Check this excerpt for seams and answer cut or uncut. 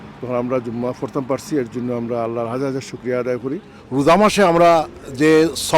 cut